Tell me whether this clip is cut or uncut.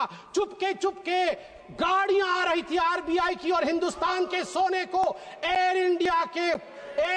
uncut